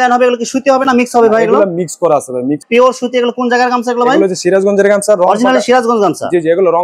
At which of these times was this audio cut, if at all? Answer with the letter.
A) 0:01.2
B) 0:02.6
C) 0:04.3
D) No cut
B